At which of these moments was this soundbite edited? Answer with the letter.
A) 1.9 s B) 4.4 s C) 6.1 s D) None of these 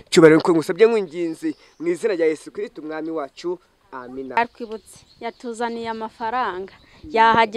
B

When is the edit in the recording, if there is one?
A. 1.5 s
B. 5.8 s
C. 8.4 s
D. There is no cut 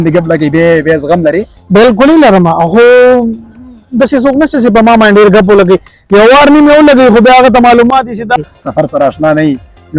C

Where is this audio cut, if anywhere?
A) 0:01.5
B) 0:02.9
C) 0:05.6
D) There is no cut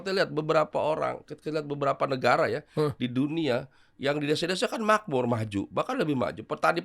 D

